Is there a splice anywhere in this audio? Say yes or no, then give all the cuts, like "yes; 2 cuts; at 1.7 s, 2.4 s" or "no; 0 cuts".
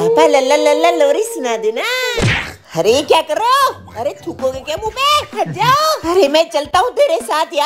no; 0 cuts